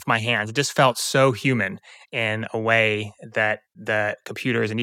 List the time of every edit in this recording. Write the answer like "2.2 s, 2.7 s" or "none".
3.7 s